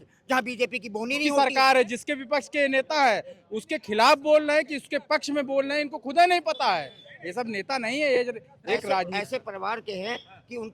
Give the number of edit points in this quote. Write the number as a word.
two